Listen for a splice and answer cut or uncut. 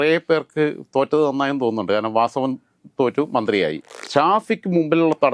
cut